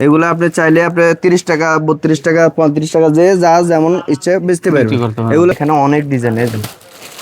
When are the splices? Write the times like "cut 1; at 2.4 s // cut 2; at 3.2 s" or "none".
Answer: cut 1; at 5.5 s